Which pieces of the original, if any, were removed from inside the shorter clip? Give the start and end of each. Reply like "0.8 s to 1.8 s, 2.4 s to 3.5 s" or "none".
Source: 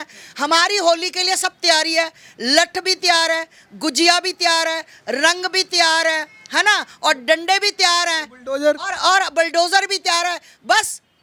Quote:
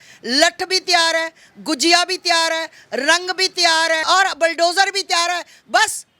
6.2 s to 9.0 s